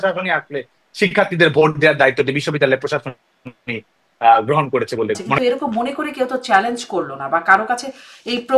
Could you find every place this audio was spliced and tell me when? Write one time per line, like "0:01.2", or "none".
0:05.4